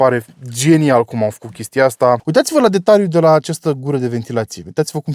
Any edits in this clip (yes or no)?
yes